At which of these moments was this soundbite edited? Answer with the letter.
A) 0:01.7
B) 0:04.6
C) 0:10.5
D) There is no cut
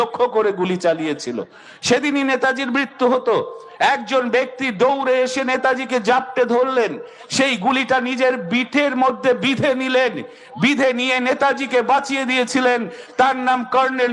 D